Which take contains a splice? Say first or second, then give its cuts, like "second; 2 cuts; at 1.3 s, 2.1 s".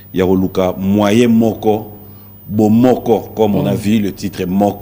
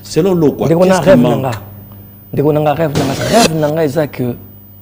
second; 1 cut; at 3.2 s